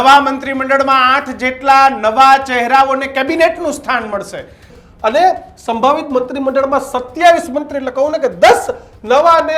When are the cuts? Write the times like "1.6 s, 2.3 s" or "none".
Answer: 4.8 s